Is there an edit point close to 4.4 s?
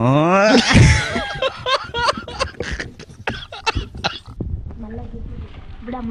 yes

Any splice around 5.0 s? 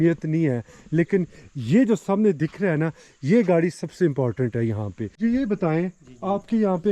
yes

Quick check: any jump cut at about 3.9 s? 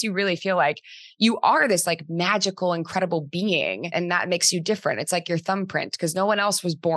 yes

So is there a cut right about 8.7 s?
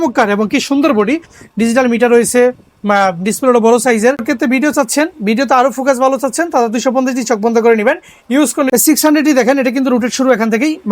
yes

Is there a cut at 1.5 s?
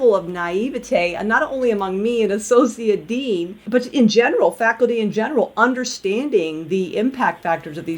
no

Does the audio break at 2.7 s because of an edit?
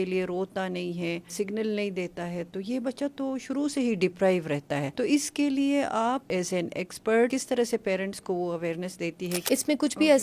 no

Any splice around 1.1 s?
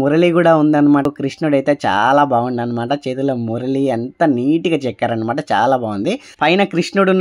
yes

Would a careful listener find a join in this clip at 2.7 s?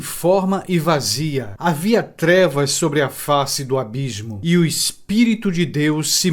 no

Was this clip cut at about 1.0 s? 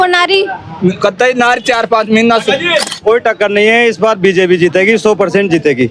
no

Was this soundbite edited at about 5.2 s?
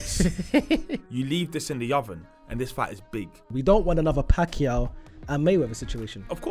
no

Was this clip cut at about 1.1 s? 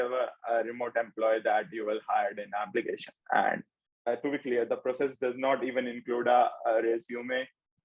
no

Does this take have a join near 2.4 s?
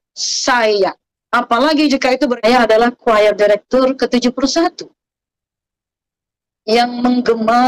yes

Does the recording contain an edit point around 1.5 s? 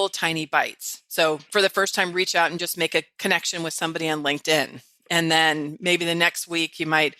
yes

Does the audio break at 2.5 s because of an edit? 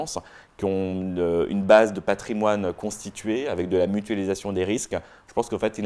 no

